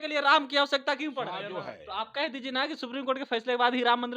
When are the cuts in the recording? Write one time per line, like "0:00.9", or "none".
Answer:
0:01.5